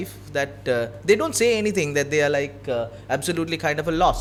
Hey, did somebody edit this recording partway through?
no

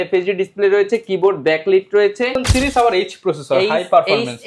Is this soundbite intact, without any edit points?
no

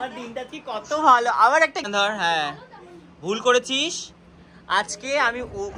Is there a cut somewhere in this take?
yes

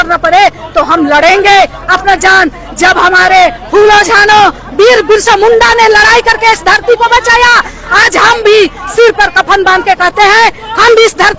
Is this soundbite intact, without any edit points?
yes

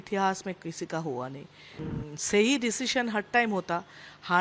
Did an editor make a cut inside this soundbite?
yes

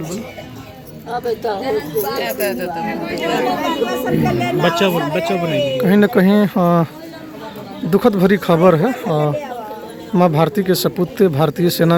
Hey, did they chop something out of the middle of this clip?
no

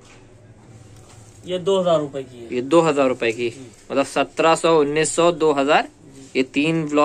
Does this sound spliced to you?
no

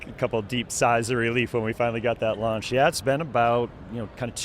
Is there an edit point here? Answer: no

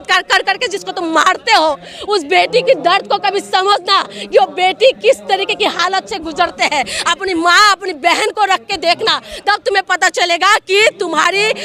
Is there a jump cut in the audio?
no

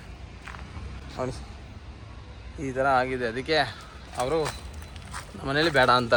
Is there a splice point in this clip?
no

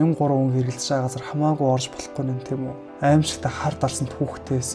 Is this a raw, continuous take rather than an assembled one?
yes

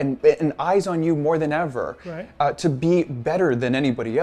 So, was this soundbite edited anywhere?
no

